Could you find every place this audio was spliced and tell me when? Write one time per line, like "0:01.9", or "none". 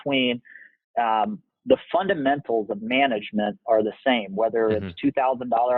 none